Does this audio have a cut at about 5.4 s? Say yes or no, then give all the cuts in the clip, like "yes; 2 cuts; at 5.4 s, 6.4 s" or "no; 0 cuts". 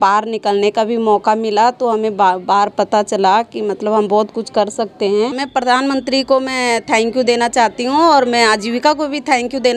yes; 1 cut; at 5.4 s